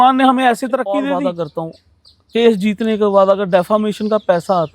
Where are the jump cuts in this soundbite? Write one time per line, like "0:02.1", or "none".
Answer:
0:01.0